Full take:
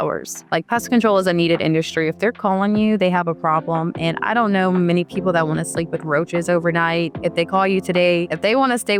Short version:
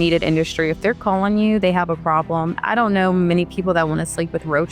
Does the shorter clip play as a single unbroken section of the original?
no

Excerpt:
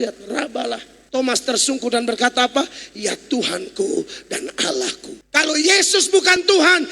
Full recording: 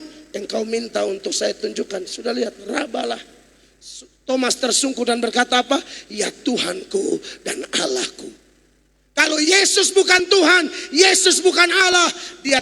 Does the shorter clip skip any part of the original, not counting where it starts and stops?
yes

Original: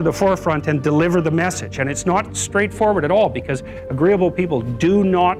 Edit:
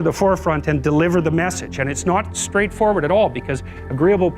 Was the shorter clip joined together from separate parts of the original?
no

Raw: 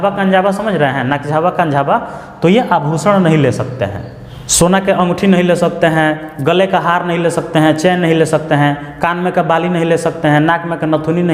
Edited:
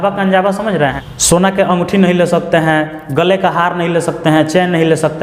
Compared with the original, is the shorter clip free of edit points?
no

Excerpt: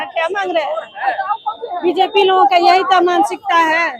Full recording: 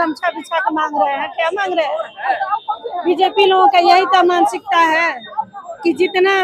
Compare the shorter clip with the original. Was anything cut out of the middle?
no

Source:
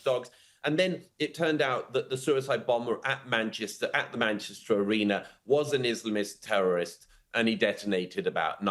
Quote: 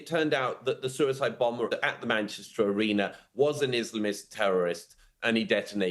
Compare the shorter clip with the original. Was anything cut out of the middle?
yes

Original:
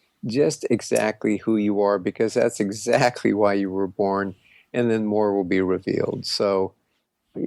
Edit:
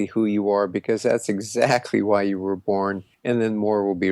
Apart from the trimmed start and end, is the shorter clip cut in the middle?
yes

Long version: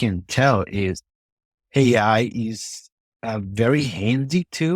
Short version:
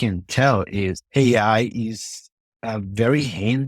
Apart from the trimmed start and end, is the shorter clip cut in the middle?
yes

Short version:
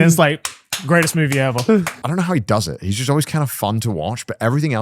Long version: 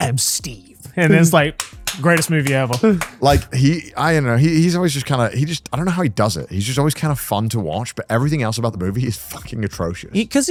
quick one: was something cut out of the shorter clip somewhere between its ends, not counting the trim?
yes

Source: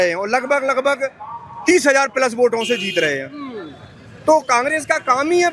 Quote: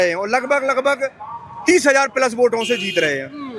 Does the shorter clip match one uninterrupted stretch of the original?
yes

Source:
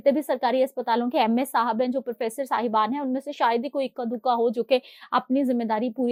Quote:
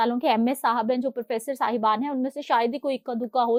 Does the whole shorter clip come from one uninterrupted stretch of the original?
yes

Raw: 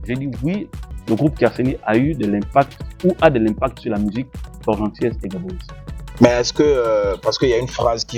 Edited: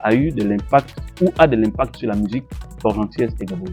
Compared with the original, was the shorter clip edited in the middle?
no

